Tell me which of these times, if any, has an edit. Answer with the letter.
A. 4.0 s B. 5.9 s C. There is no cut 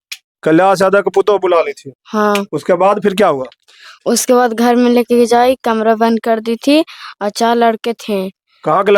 C